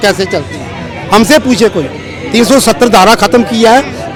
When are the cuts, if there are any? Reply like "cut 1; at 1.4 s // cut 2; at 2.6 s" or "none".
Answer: none